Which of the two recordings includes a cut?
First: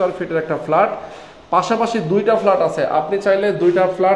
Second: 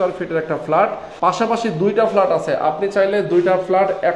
second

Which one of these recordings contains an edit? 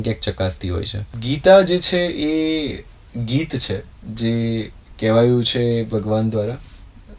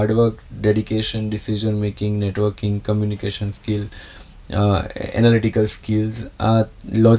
first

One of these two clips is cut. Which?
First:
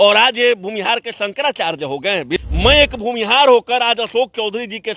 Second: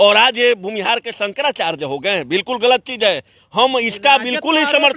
first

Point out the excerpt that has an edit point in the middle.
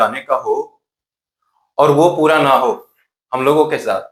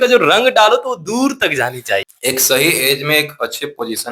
second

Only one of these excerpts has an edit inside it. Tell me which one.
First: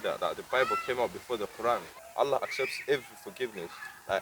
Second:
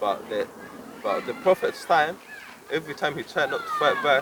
first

